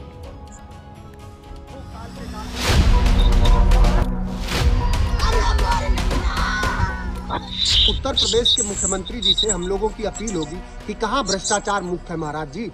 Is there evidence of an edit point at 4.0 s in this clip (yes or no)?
yes